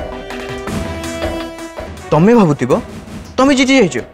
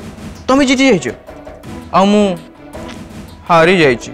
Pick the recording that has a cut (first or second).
first